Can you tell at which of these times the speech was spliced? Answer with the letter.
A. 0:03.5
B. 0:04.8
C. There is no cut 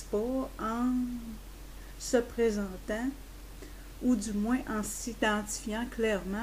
B